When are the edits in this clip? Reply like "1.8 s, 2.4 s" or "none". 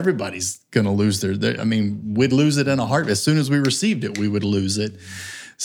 none